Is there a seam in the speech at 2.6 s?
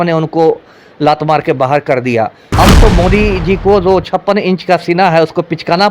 yes; 1 cut; at 2.6 s

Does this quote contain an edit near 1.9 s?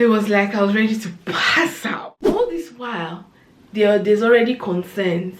yes; 1 cut; at 1.9 s

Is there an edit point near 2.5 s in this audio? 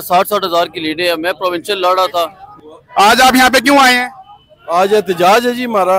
yes; 1 cut; at 2.5 s

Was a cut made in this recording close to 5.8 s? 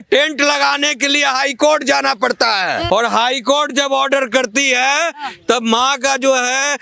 no; 1 cut; at 2.8 s

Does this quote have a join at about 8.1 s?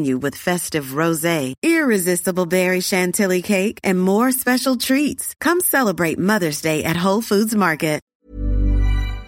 yes; 1 cut; at 8.1 s

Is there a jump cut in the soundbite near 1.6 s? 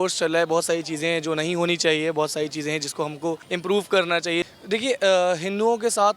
no; 2 cuts; at 3.4 s, 4.4 s

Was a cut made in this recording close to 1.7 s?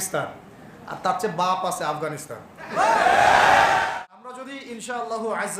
no; 1 cut; at 3.9 s

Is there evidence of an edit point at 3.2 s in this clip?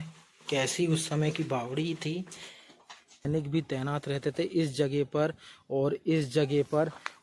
yes; 1 cut; at 3.2 s

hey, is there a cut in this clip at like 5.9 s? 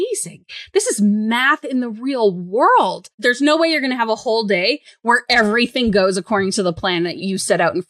no; 2 cuts; at 3.1 s, 7.2 s

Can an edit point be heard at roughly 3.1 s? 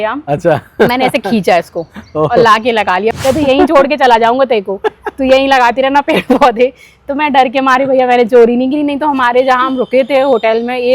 yes; 1 cut; at 3.1 s

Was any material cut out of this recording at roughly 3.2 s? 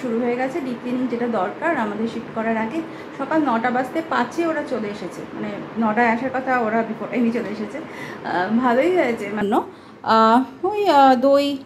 no; 1 cut; at 9.4 s

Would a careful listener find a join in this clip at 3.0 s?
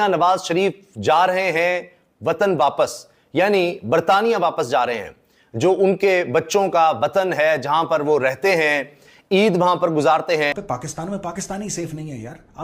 no; 1 cut; at 10.5 s

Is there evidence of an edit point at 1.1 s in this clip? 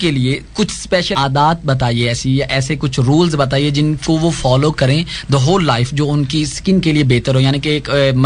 yes; 1 cut; at 1.1 s

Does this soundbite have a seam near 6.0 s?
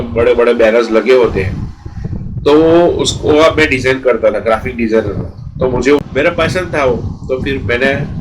yes; 1 cut; at 6.0 s

